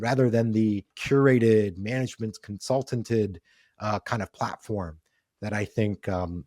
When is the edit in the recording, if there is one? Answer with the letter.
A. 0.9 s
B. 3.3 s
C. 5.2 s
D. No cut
A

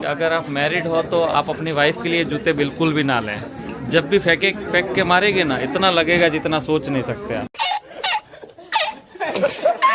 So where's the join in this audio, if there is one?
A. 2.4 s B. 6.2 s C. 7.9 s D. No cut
D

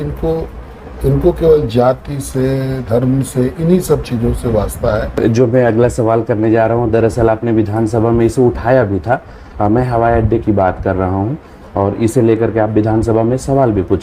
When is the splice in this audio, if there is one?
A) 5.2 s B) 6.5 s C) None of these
A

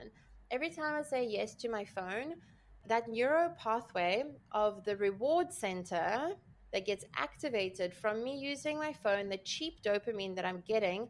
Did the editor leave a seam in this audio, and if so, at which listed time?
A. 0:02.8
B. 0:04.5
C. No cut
A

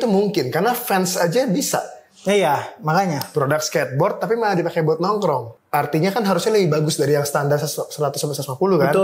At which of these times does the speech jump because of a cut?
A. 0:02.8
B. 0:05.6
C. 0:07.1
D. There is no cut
B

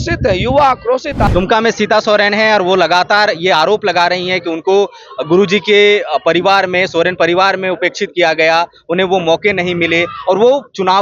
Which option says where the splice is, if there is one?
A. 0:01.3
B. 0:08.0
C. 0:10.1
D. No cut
A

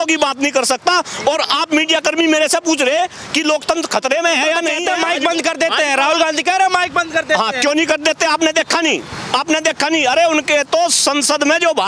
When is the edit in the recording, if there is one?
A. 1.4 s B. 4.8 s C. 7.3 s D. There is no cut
B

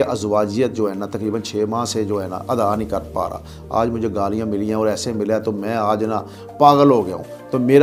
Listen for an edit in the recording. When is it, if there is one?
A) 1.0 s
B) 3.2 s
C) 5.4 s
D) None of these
D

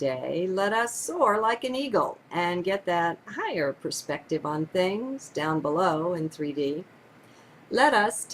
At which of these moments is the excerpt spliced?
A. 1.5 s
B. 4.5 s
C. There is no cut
B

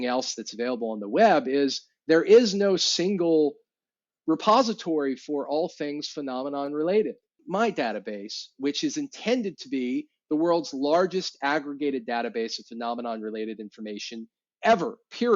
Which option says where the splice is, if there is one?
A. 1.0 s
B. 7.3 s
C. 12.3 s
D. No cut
B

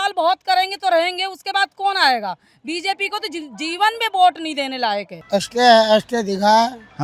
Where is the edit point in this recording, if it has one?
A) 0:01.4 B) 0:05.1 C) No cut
B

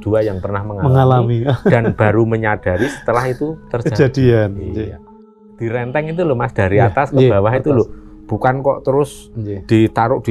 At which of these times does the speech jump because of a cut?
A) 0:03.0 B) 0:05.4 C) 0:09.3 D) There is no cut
B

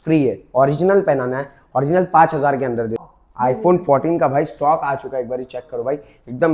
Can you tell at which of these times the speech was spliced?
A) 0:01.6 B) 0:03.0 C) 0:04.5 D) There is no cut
B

